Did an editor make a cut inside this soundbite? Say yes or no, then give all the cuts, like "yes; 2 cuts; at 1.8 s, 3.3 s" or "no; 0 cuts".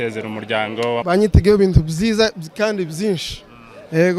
yes; 1 cut; at 1.0 s